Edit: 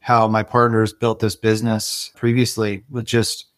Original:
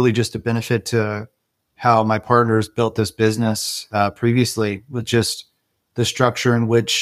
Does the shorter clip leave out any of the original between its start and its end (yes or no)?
yes